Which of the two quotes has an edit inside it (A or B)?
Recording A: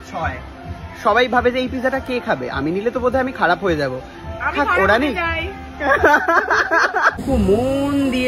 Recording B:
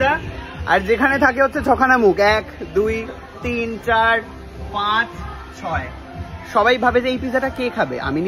A